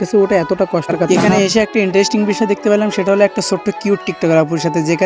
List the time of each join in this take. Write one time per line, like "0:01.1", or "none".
0:01.1